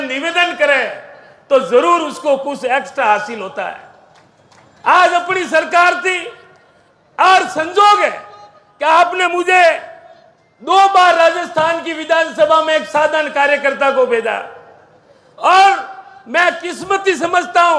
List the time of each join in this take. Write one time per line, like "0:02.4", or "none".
none